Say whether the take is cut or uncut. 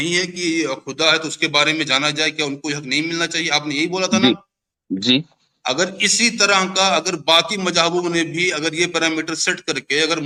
uncut